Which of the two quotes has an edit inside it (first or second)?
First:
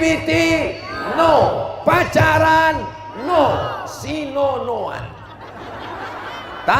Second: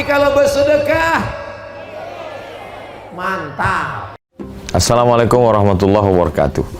second